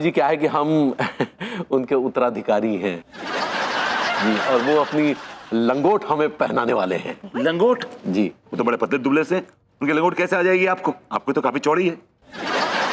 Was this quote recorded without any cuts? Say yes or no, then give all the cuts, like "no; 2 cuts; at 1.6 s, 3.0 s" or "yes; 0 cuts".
yes; 0 cuts